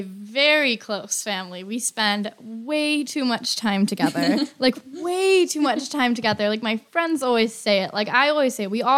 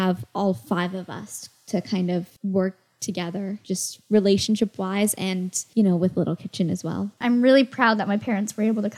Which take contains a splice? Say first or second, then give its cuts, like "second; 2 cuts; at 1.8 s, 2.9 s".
second; 4 cuts; at 2.3 s, 3.6 s, 5.6 s, 7.2 s